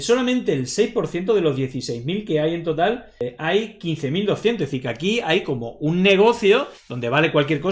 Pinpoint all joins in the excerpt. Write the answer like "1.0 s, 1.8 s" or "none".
none